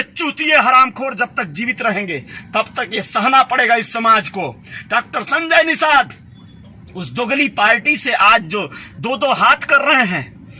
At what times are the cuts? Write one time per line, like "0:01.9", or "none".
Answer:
none

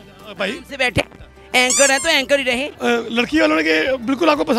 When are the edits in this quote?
0:02.7

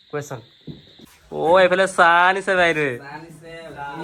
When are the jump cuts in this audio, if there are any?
0:01.0

